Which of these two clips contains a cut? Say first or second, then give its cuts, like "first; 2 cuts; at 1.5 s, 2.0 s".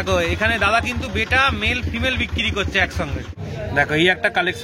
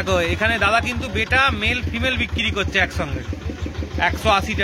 first; 1 cut; at 3.3 s